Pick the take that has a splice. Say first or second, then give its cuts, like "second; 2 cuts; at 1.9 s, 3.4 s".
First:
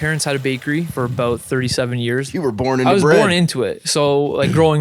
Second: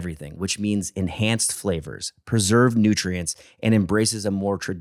first; 2 cuts; at 0.9 s, 2.3 s